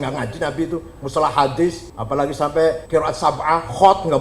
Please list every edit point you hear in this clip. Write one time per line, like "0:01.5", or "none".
0:01.9
0:02.8